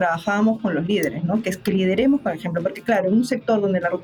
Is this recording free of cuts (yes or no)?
yes